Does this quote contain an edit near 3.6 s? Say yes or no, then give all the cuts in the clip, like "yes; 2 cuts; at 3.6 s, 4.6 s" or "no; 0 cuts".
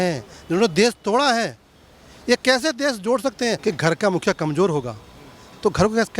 yes; 1 cut; at 3.6 s